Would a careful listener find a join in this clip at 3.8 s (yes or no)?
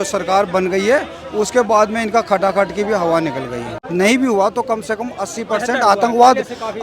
yes